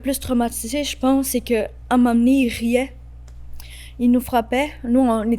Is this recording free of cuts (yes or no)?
yes